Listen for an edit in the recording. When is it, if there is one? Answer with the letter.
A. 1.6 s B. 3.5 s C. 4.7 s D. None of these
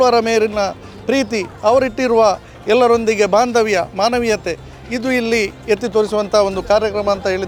D